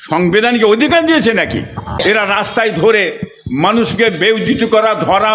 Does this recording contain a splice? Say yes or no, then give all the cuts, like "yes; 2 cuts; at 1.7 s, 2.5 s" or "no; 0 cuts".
yes; 1 cut; at 1.9 s